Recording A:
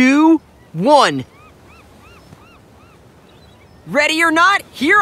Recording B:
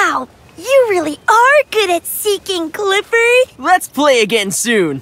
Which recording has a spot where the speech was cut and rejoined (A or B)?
A